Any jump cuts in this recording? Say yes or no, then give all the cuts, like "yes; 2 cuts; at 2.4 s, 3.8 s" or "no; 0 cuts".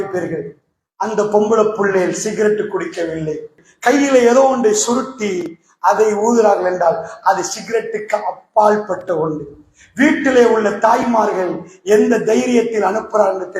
yes; 1 cut; at 3.6 s